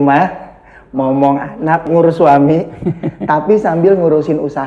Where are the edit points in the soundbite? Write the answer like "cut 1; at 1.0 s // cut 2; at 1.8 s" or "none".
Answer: cut 1; at 1.9 s

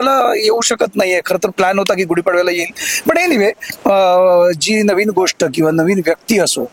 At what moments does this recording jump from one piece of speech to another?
none

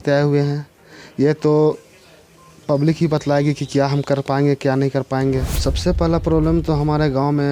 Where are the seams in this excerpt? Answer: cut 1; at 5.5 s

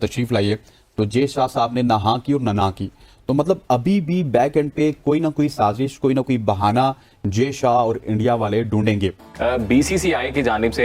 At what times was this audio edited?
cut 1; at 9.3 s

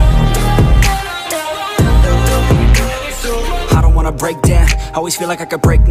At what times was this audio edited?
cut 1; at 3.6 s

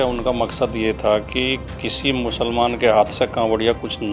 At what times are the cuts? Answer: none

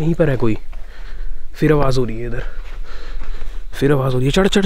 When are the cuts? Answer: none

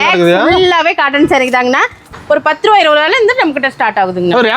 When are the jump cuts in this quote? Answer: cut 1; at 2.1 s

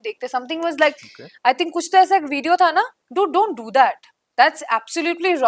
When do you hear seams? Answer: cut 1; at 3.0 s

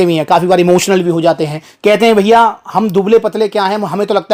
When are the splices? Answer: none

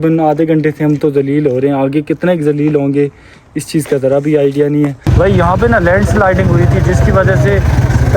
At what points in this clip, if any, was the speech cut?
cut 1; at 5.0 s

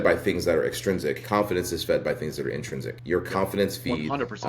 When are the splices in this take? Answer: cut 1; at 1.2 s // cut 2; at 2.9 s

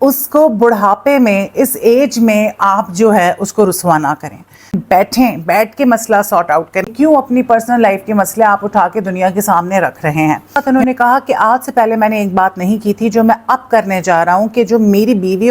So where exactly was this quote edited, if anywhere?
cut 1; at 4.8 s // cut 2; at 6.9 s // cut 3; at 10.6 s

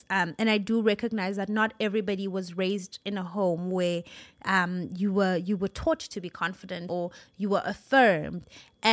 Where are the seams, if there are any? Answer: cut 1; at 6.8 s

